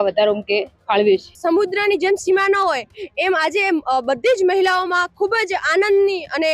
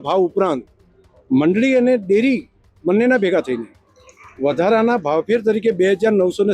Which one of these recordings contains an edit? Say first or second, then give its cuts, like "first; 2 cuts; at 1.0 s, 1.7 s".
first; 1 cut; at 1.4 s